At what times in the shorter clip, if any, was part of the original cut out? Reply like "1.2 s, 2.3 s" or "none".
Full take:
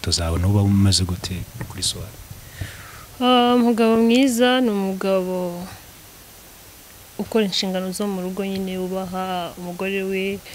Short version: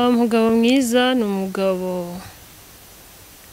none